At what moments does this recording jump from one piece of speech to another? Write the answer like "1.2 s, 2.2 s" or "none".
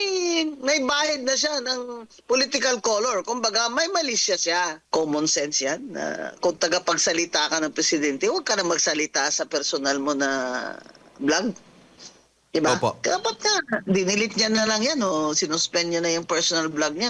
4.8 s